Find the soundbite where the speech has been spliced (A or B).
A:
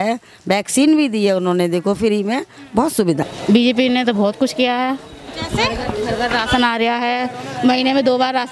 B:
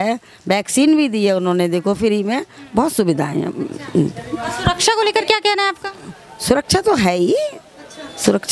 A